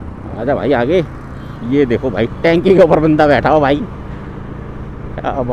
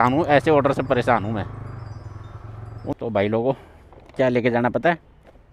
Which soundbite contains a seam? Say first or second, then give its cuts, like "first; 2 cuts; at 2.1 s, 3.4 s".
second; 1 cut; at 2.9 s